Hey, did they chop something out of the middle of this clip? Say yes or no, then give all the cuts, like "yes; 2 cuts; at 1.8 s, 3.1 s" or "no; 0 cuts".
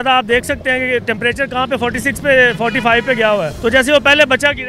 yes; 1 cut; at 3.5 s